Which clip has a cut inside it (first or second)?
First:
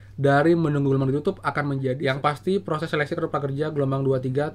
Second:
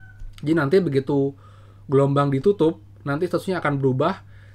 first